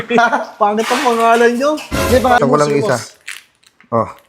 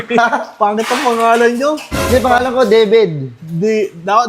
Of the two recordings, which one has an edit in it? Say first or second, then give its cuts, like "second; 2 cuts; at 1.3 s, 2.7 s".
first; 1 cut; at 2.4 s